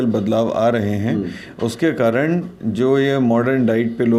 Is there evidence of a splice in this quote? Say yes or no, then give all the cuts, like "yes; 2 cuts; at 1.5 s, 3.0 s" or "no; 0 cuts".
no; 0 cuts